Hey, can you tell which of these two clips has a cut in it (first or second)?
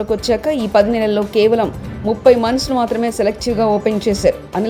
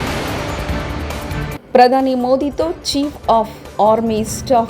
second